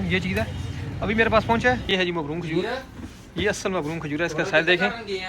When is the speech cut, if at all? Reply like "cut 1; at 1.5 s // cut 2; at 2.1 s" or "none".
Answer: cut 1; at 1.8 s